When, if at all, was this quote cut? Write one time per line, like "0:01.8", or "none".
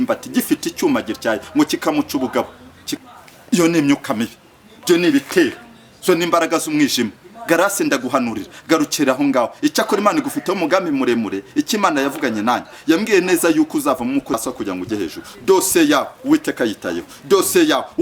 0:02.9
0:14.4